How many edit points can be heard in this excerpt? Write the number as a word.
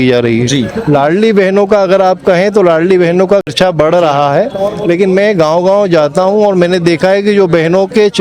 one